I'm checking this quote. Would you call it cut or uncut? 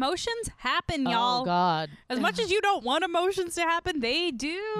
uncut